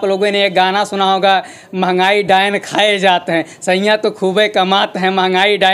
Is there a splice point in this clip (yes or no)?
no